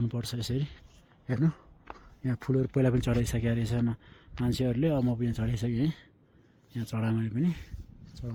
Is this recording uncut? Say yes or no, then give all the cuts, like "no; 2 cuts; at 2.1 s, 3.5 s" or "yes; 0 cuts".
yes; 0 cuts